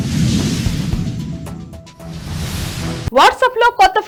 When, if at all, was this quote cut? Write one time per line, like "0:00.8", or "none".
none

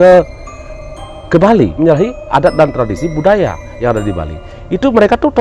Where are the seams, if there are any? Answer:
0:01.7

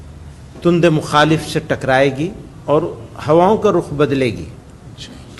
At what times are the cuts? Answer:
0:02.5

